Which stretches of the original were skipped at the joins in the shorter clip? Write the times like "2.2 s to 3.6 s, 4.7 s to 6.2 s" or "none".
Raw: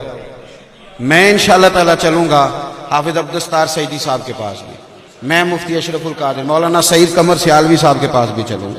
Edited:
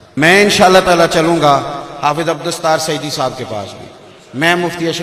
none